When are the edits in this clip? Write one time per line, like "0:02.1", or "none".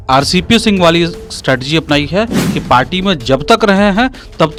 none